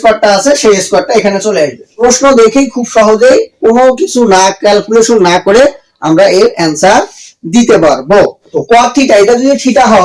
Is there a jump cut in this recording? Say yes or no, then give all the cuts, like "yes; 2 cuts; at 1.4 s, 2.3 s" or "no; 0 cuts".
yes; 2 cuts; at 1.9 s, 8.5 s